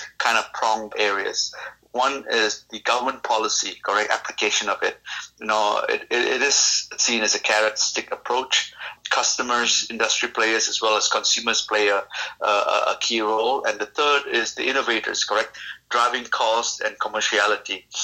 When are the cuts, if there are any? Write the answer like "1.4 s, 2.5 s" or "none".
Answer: 0.9 s, 8.9 s